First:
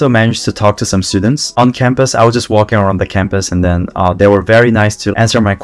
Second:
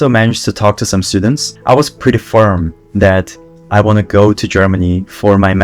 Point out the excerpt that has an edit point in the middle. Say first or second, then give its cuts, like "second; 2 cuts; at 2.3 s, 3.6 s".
second; 1 cut; at 1.4 s